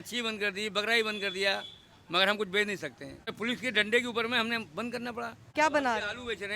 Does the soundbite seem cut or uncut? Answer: cut